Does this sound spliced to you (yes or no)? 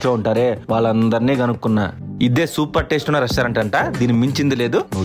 no